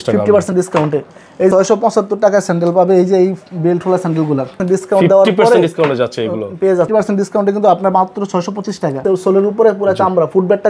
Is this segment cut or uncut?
cut